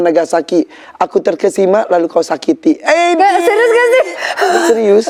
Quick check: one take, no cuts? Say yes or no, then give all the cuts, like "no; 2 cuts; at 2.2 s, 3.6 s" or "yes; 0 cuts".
yes; 0 cuts